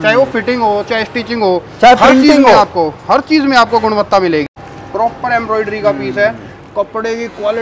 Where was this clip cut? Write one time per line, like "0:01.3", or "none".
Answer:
0:04.5